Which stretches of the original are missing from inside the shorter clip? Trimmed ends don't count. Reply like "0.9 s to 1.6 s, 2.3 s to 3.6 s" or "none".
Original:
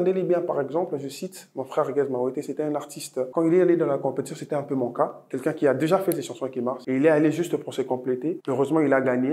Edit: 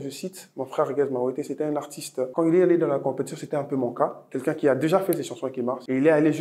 none